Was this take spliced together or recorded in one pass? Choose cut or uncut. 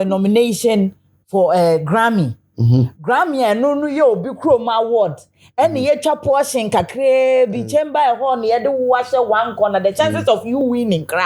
uncut